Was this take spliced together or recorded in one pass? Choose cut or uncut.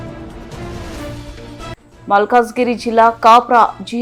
uncut